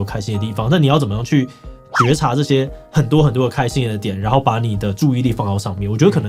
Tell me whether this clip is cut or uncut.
uncut